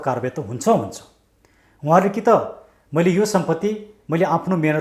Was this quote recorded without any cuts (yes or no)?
yes